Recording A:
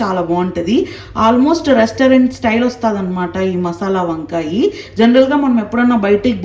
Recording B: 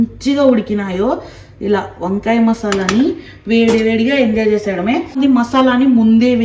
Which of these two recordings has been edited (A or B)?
B